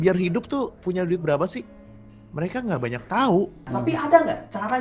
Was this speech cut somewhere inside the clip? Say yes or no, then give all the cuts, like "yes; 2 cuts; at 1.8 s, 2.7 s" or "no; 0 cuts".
yes; 1 cut; at 3.6 s